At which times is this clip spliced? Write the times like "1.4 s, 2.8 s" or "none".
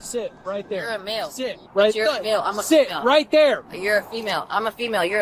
none

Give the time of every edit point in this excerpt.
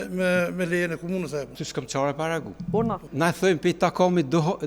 1.6 s, 3.0 s

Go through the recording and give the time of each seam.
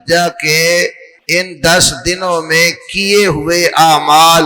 1.1 s

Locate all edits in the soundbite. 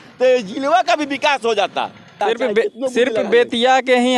2.0 s

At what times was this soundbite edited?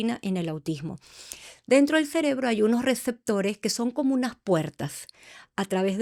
none

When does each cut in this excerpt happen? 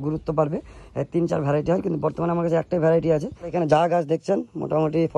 3.5 s

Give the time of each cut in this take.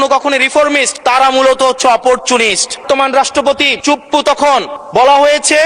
0.9 s, 2.8 s, 3.7 s, 4.8 s

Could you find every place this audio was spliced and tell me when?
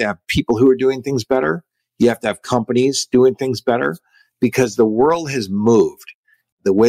none

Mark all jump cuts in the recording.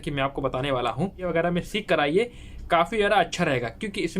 1.3 s

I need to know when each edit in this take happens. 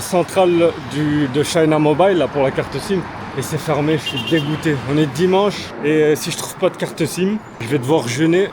3.2 s, 5.7 s, 7.5 s

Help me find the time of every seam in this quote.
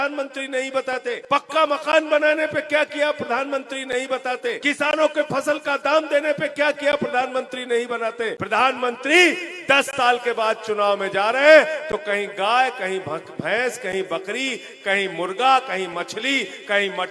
1.2 s, 4.6 s, 8.4 s

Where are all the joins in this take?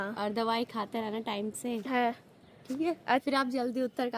3.2 s

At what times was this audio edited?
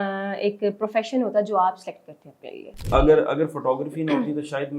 2.8 s

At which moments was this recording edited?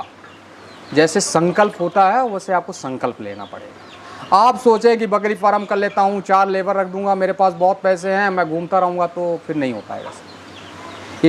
none

